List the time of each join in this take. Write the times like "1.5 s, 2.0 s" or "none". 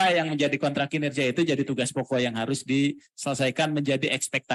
none